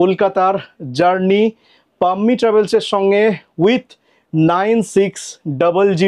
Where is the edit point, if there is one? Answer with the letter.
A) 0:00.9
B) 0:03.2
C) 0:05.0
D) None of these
D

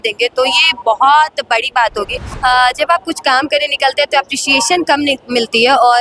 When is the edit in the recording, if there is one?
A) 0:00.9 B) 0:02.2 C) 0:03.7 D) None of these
B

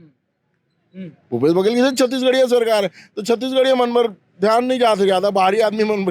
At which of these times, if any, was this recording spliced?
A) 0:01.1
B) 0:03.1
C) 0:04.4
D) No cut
D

